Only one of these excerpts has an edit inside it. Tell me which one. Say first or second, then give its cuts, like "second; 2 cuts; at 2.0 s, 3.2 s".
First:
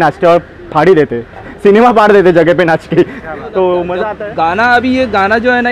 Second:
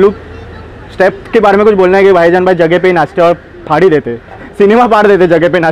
first; 1 cut; at 4.0 s